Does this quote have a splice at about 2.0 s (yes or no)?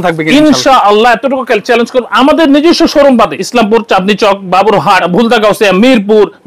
no